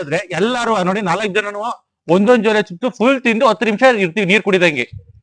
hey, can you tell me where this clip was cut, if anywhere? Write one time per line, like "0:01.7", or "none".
none